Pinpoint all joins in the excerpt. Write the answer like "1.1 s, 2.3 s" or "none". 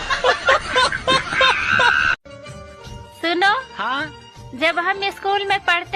2.1 s